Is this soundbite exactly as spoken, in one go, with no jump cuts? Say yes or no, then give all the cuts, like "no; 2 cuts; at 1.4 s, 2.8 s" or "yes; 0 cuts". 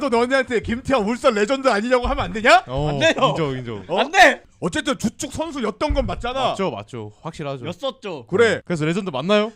no; 2 cuts; at 4.5 s, 8.7 s